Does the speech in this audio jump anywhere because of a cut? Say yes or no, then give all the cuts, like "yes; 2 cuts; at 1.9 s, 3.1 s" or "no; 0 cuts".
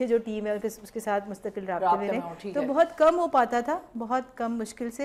no; 0 cuts